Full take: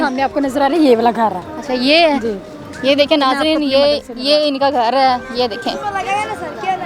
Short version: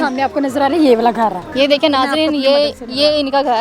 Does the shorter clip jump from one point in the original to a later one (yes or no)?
yes